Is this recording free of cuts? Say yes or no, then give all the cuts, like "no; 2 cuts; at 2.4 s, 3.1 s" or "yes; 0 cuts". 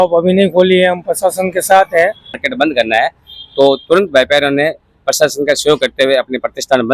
no; 1 cut; at 2.5 s